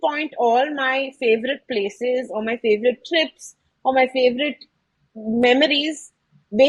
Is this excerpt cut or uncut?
uncut